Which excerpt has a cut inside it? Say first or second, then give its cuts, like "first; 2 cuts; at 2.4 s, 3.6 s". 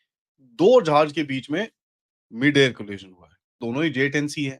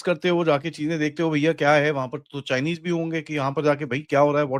first; 1 cut; at 3.6 s